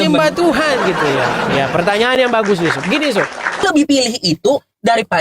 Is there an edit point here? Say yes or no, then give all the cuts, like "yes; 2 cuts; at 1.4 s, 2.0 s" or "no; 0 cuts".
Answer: yes; 1 cut; at 3.6 s